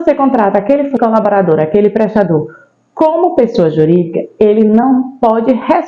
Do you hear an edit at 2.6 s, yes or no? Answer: no